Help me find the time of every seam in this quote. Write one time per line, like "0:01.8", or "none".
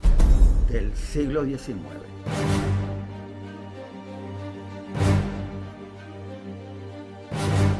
0:06.7